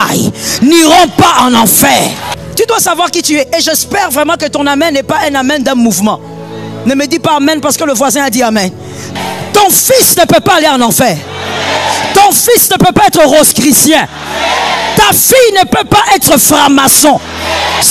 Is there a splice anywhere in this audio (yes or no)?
yes